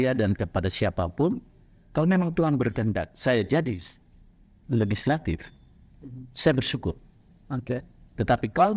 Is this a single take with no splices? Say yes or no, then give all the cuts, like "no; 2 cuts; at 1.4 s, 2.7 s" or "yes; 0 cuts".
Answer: yes; 0 cuts